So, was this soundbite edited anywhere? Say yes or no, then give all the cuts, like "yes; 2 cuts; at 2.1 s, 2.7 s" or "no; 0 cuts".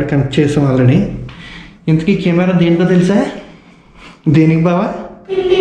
no; 0 cuts